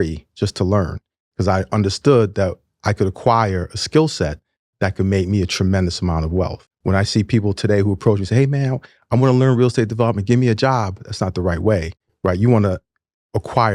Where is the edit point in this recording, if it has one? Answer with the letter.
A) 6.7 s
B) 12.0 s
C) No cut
A